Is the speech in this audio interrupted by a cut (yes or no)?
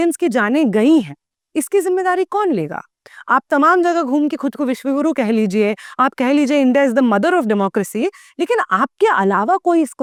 no